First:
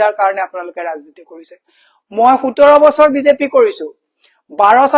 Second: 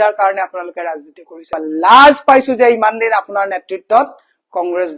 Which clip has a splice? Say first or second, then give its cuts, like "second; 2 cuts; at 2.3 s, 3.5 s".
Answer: second; 1 cut; at 1.6 s